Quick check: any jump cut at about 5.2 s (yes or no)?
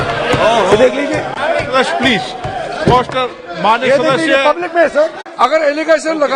yes